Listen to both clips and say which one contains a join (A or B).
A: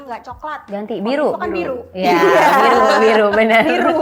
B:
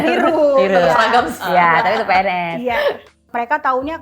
B